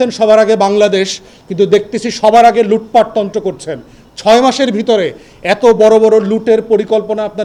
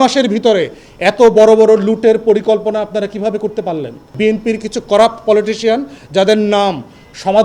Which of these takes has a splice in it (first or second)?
second